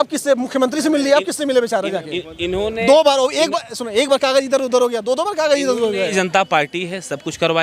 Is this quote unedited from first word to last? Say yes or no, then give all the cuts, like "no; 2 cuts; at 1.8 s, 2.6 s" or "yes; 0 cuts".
no; 1 cut; at 6.1 s